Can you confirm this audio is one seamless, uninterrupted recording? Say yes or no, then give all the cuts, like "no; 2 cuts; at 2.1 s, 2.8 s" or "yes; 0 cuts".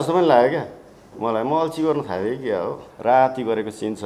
no; 1 cut; at 2.9 s